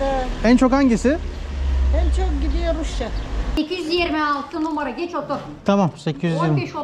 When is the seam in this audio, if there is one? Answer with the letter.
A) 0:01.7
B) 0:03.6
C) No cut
B